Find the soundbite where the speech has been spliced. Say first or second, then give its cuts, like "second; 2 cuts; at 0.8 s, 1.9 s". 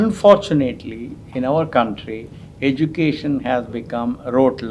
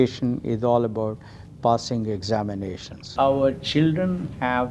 second; 1 cut; at 3.1 s